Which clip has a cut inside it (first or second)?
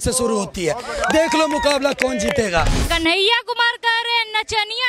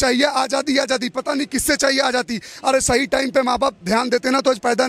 first